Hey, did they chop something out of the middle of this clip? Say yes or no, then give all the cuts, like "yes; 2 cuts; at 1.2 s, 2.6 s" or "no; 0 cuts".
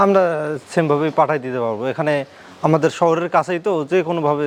no; 0 cuts